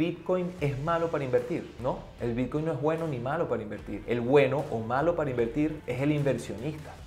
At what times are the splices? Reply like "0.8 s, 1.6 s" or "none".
2.1 s